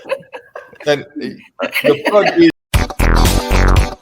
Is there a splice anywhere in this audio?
yes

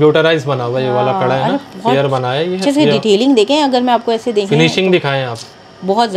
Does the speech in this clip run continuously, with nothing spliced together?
yes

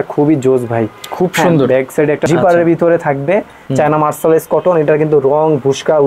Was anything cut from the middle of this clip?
yes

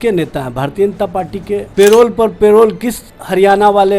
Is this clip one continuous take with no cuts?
no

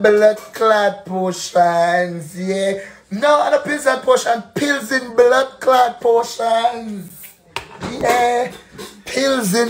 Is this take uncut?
yes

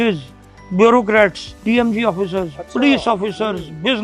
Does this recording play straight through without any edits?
yes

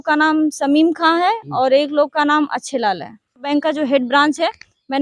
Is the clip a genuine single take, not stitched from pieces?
no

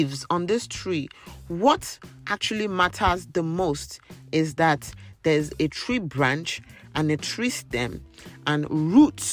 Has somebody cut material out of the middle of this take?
no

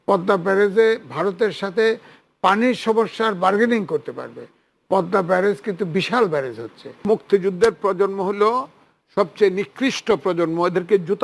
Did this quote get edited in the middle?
yes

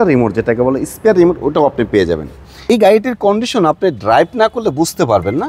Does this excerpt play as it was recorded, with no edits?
no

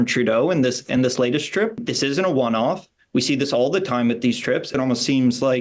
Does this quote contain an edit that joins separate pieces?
yes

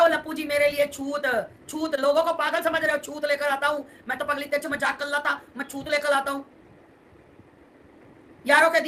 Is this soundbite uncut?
yes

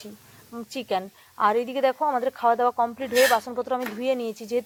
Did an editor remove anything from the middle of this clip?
no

